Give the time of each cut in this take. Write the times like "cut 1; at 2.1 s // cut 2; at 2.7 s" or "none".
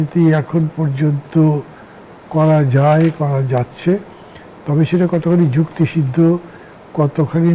none